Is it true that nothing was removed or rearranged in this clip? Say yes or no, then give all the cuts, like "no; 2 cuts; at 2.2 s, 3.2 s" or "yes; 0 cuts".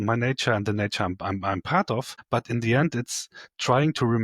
no; 1 cut; at 2.2 s